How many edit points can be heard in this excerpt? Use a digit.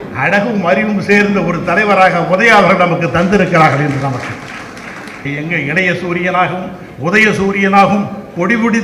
1